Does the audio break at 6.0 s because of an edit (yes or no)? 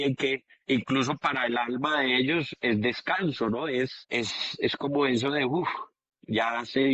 no